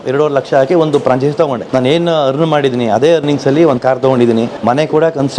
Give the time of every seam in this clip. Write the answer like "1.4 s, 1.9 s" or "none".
1.6 s, 4.5 s